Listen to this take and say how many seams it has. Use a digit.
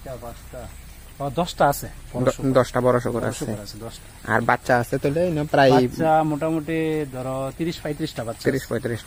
0